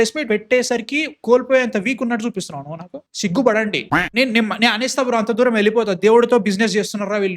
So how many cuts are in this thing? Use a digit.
1